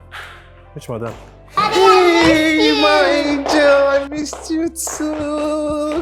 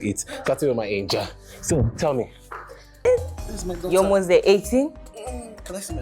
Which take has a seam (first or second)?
second